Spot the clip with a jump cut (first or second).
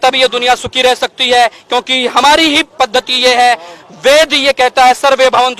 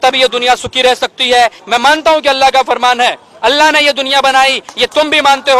second